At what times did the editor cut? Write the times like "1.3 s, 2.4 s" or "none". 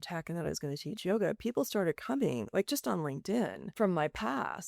3.8 s